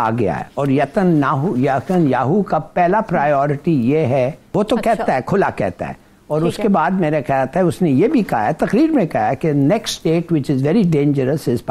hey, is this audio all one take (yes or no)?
no